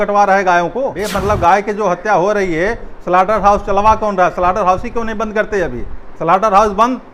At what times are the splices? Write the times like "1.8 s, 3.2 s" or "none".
1.0 s